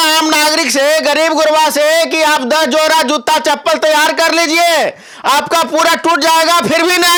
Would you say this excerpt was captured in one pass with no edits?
yes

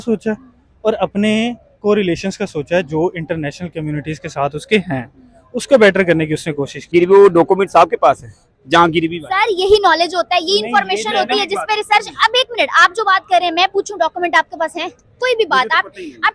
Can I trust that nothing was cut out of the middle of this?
no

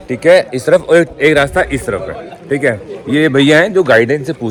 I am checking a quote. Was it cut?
no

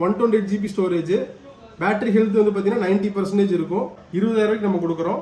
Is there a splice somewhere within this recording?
yes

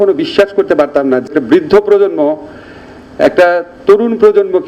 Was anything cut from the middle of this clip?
yes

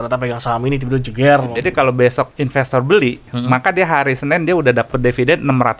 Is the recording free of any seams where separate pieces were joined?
no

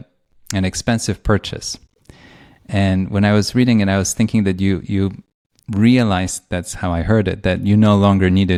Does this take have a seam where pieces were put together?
no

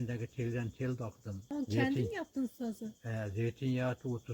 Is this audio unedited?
no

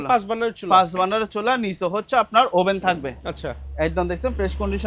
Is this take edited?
no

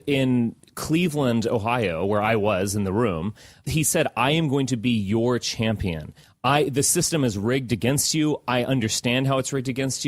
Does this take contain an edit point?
yes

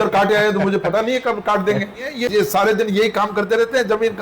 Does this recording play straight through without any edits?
no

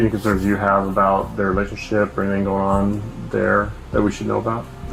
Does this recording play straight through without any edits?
yes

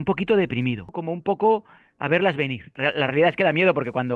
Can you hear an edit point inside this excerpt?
yes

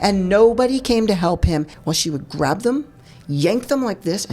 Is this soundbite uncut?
no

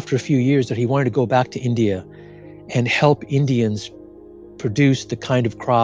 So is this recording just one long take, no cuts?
yes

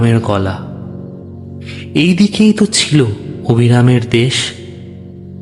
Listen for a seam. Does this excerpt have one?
yes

